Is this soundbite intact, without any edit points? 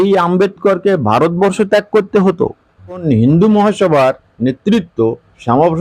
no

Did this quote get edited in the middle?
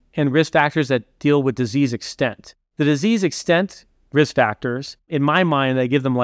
no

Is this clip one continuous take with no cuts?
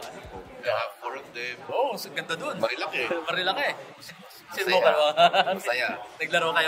yes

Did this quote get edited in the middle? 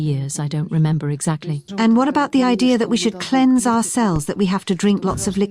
yes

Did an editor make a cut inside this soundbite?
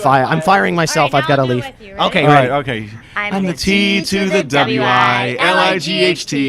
yes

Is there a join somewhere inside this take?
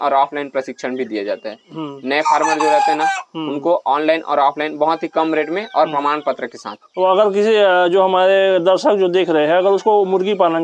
no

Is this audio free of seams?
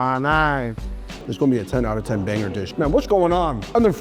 no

